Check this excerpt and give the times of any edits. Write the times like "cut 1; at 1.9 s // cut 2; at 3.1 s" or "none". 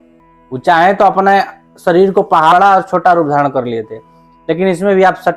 cut 1; at 2.5 s